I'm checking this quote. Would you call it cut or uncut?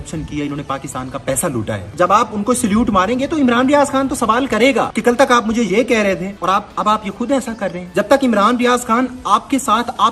cut